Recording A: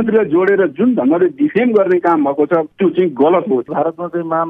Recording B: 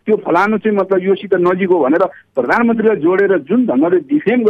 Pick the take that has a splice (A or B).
A